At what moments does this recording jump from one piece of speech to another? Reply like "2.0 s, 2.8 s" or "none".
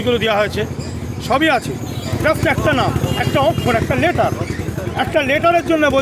2.1 s

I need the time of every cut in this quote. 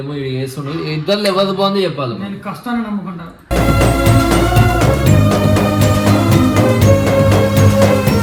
none

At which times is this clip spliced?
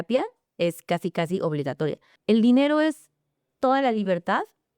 2.1 s

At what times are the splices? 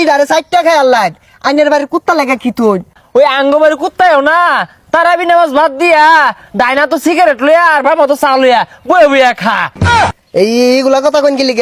3.0 s, 10.0 s

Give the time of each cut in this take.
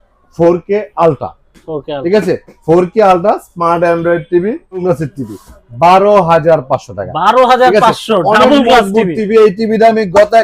4.8 s

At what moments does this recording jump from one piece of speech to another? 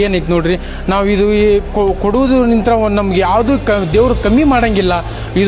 none

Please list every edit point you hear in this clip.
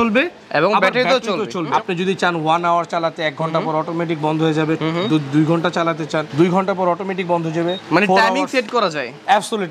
1.7 s, 6.3 s, 7.8 s

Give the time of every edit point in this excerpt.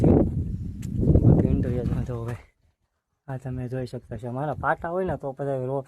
1.9 s

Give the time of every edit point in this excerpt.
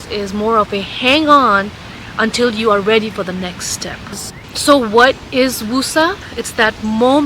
4.2 s, 6.3 s

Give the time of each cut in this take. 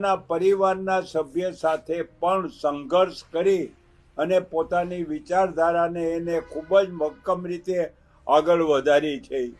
none

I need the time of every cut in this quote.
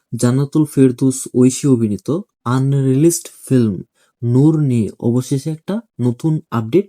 none

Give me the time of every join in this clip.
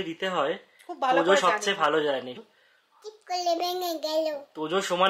2.3 s

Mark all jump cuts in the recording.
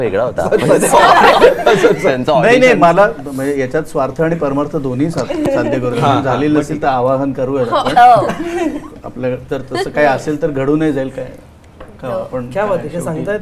none

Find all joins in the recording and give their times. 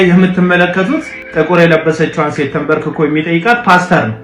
1.2 s

